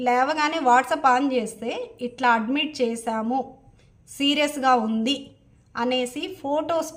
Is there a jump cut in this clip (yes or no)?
no